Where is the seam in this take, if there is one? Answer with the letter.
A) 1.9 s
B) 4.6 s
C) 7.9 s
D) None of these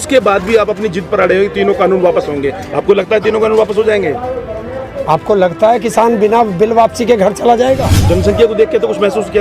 C